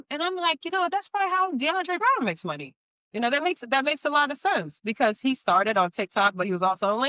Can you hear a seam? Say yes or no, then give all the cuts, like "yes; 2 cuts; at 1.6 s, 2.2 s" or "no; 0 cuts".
no; 0 cuts